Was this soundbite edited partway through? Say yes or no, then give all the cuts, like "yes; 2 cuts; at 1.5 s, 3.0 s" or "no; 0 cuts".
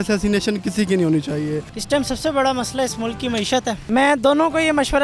yes; 2 cuts; at 1.7 s, 3.8 s